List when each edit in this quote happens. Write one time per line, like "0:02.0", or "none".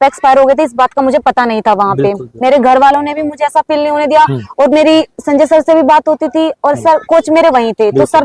none

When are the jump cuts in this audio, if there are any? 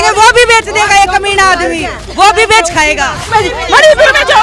0:03.3

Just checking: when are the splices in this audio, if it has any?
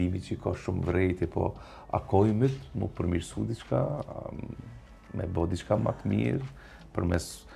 none

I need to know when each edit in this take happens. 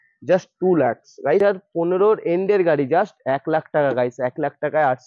0:01.4

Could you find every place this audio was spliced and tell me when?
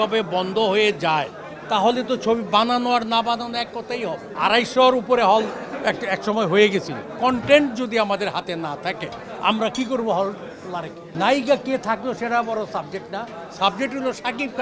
0:04.3
0:07.0
0:11.0

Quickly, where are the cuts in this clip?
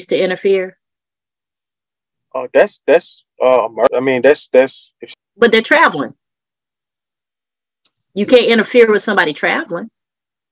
0:03.9
0:05.0

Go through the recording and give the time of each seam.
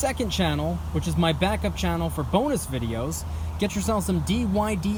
none

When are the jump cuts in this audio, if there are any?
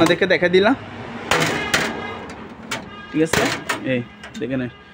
none

